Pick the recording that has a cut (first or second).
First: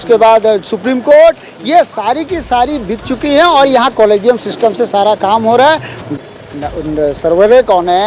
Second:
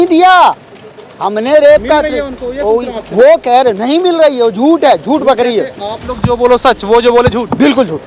first